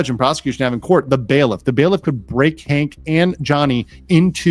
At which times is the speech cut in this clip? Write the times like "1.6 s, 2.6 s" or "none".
none